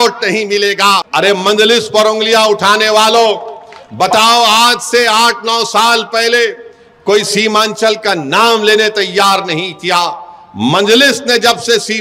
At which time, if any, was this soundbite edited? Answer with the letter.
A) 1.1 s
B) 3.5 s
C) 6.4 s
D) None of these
A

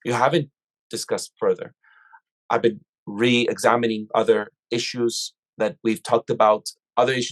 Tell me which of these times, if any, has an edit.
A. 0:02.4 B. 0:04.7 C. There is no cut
A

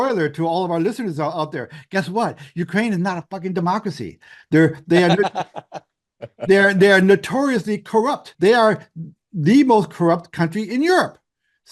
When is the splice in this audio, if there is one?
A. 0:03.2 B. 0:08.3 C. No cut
C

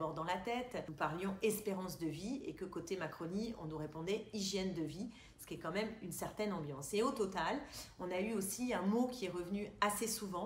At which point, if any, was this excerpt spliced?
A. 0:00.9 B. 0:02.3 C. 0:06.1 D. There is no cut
A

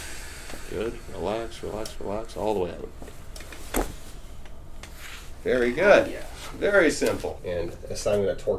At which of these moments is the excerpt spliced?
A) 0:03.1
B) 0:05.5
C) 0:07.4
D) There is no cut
C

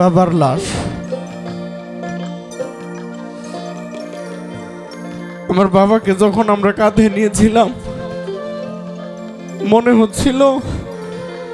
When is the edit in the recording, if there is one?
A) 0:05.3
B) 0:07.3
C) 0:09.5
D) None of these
D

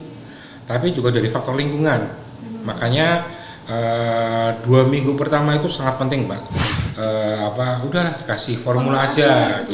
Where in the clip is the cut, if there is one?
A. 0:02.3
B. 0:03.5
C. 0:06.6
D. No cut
C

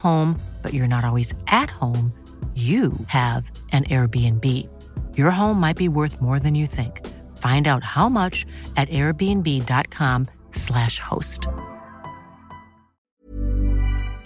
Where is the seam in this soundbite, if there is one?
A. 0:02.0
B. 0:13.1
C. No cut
B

